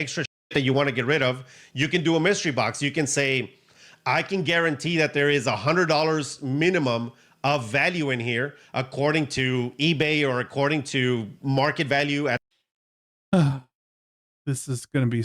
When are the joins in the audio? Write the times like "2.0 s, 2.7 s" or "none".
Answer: 12.6 s